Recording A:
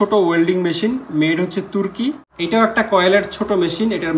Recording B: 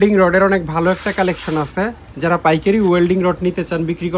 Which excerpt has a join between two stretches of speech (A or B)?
A